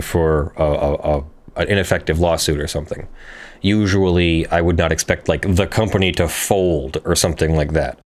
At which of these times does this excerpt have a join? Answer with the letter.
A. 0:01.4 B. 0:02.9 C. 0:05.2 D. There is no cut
A